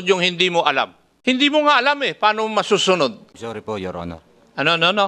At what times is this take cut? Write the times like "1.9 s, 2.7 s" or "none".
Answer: 1.0 s, 3.3 s

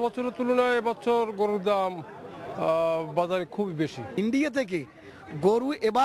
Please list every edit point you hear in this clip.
4.0 s

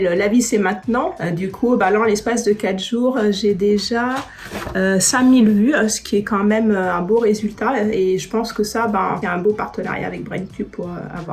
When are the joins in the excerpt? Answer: 1.2 s, 9.2 s

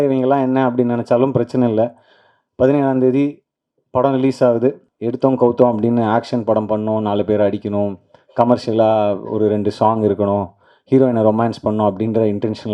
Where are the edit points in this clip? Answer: 4.9 s

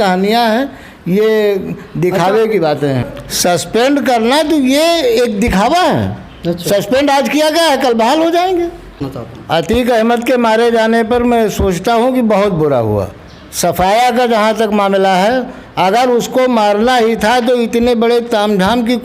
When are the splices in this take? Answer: 3.1 s, 9.1 s

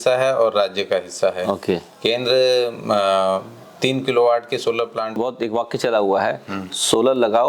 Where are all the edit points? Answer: 5.2 s

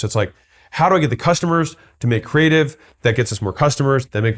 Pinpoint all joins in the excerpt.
none

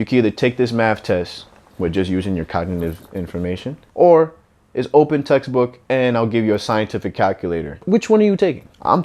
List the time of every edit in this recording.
3.8 s, 7.8 s

